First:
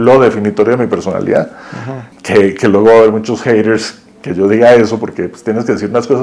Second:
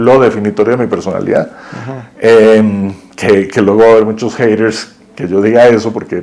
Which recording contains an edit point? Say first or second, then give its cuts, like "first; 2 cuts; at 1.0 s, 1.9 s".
first; 1 cut; at 2.0 s